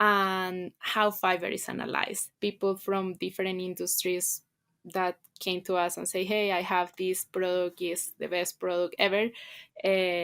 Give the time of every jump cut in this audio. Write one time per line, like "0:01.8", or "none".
0:02.2